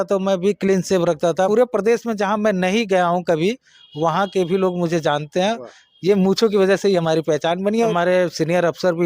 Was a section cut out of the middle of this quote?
yes; 2 cuts; at 1.5 s, 7.9 s

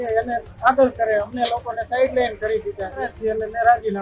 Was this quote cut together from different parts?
yes; 1 cut; at 3.1 s

